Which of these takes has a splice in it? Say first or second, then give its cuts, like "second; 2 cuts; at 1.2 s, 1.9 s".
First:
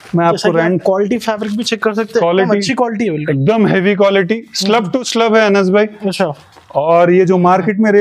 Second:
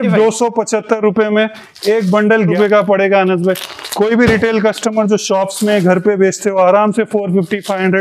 second; 1 cut; at 2.5 s